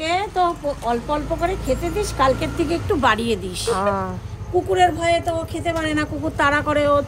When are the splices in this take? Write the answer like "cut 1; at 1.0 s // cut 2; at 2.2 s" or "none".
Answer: none